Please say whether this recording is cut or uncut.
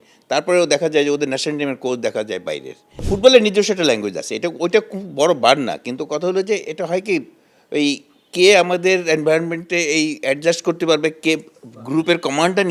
cut